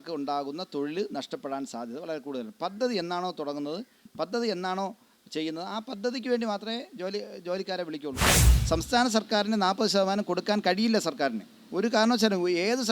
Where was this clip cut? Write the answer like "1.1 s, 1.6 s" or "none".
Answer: 8.5 s